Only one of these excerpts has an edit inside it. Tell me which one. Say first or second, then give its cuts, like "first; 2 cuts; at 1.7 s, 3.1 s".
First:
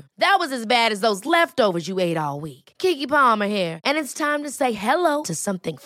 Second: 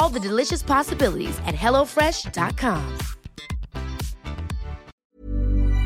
second; 1 cut; at 4.9 s